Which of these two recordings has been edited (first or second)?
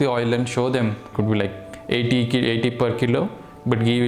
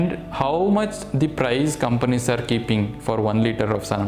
first